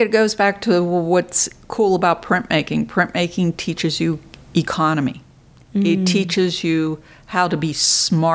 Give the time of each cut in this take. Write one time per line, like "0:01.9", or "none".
none